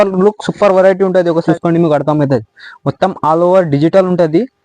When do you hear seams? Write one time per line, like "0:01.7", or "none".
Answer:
0:01.4